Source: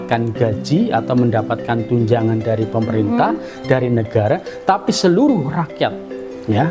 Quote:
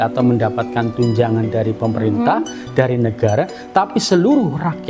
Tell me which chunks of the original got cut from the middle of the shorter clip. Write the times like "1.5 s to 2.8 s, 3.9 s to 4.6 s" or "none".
none